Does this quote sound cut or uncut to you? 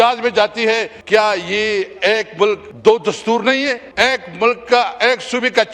cut